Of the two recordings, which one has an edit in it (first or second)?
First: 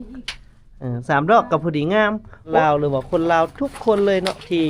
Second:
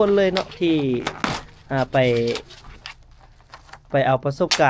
first